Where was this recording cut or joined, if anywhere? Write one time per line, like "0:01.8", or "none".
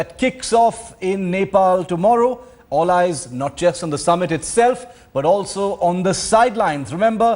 none